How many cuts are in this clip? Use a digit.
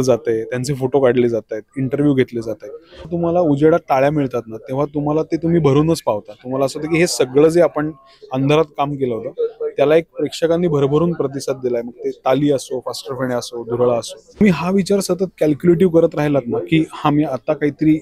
2